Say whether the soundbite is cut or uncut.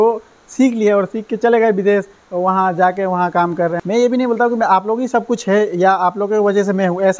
cut